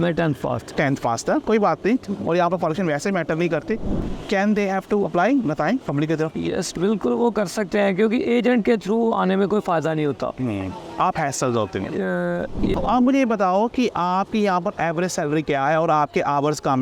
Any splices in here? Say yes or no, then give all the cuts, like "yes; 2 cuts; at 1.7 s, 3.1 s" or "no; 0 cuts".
yes; 2 cuts; at 3.9 s, 12.6 s